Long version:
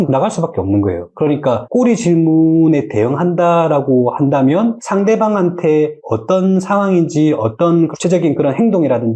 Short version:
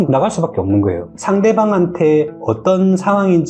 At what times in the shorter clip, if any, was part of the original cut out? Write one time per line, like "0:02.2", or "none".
0:01.1